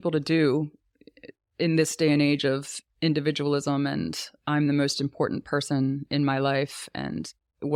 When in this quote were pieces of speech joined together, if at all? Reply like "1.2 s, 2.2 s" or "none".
none